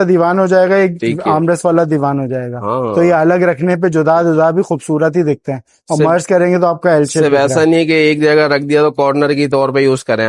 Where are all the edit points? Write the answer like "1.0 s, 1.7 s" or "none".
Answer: none

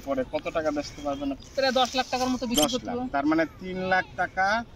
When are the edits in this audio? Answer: 1.4 s

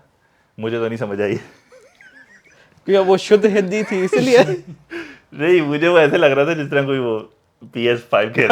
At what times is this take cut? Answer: none

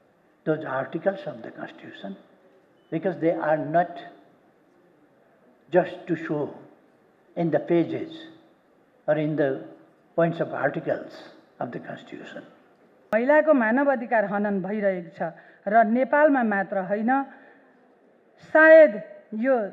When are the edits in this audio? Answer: 13.1 s

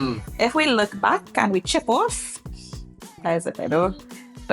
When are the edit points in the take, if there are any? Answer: none

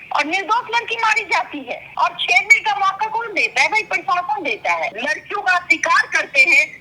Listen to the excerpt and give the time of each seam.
1.8 s, 5.0 s

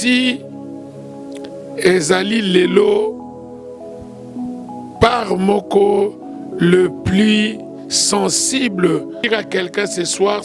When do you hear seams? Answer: 9.2 s

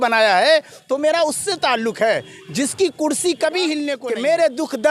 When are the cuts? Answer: 3.9 s

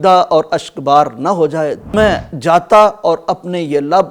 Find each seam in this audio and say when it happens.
1.9 s

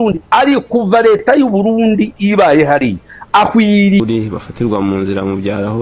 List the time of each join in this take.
4.0 s

